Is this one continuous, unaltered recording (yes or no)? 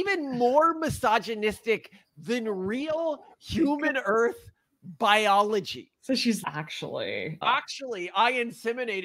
yes